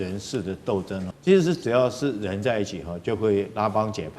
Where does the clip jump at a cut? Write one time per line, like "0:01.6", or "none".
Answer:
0:01.1